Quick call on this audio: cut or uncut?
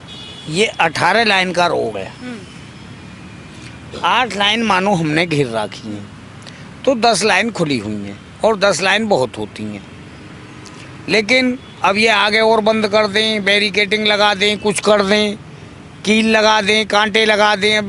uncut